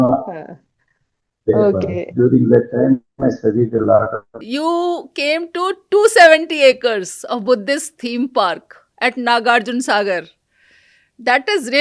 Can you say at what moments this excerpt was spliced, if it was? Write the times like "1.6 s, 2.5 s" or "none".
4.3 s